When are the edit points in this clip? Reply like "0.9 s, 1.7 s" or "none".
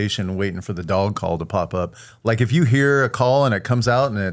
2.1 s

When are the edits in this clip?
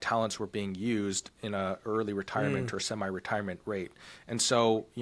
none

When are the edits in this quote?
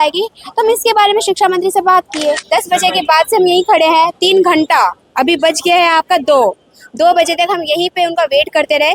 2.4 s

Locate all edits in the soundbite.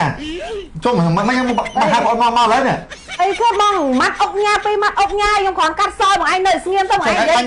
none

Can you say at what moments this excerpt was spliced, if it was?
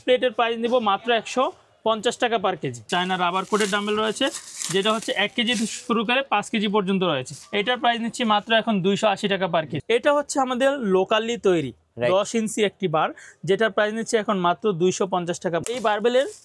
2.8 s, 7.4 s, 9.7 s, 15.6 s

